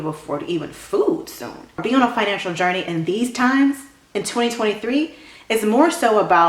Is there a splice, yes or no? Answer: yes